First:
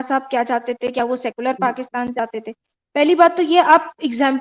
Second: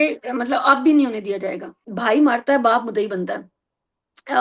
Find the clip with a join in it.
second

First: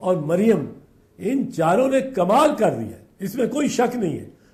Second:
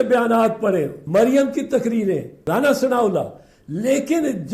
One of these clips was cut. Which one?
second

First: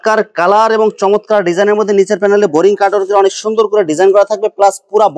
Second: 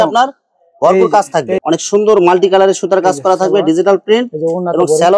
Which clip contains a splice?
second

